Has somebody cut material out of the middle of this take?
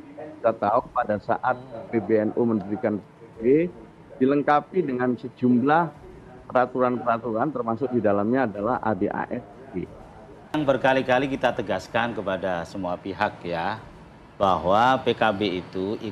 yes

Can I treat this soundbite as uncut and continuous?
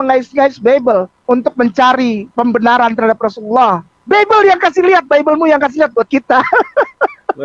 no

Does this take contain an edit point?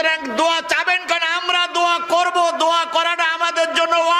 no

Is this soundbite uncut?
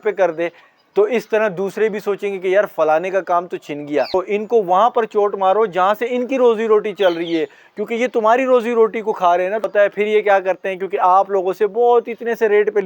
no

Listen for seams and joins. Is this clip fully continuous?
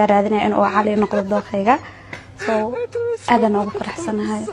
yes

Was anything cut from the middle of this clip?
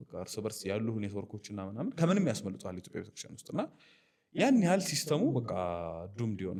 no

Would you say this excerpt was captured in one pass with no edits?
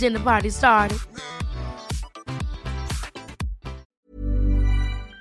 no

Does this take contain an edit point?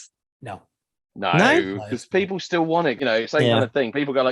yes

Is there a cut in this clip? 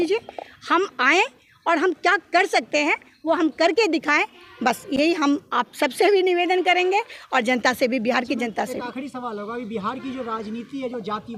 no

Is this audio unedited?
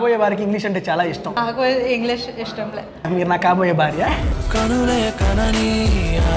no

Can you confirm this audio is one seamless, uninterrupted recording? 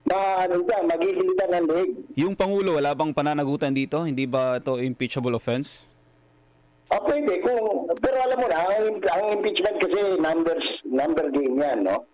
no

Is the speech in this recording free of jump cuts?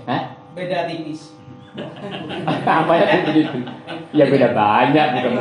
yes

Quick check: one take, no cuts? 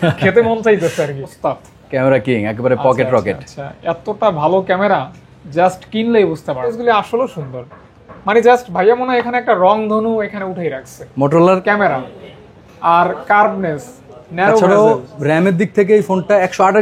no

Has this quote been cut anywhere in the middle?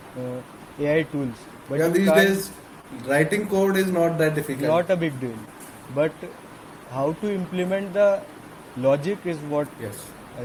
no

